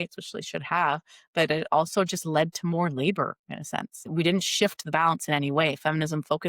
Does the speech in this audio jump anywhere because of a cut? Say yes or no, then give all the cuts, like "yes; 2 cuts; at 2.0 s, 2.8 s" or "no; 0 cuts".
yes; 1 cut; at 4.0 s